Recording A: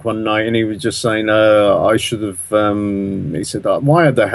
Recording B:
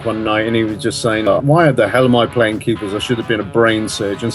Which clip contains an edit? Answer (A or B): B